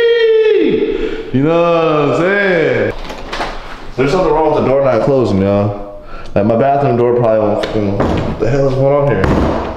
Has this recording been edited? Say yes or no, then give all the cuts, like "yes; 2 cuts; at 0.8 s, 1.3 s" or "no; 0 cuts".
yes; 1 cut; at 2.9 s